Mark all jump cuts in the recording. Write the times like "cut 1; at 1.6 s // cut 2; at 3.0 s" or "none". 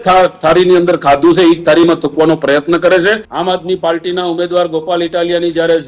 cut 1; at 3.3 s